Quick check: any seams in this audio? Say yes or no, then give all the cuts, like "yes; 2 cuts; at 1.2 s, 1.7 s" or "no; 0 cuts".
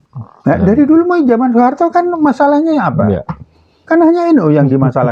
no; 0 cuts